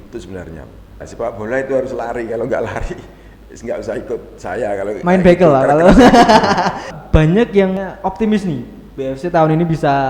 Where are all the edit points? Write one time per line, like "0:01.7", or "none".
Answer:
0:01.0
0:06.9
0:07.8

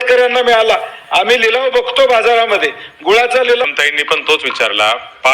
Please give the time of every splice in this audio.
0:03.6

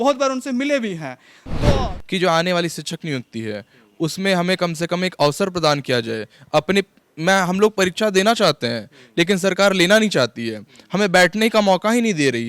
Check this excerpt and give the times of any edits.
0:01.8

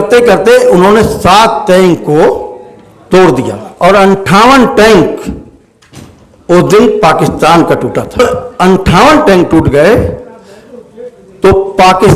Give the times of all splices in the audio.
0:03.6
0:08.2

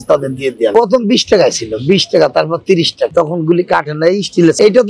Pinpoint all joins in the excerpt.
none

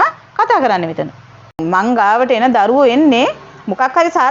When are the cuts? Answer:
0:01.6

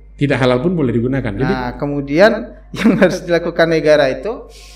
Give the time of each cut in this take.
0:01.7

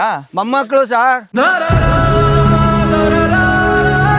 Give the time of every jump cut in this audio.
none

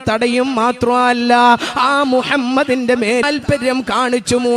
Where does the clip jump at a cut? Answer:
0:03.2

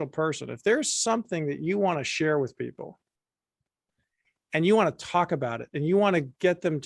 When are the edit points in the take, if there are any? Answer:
none

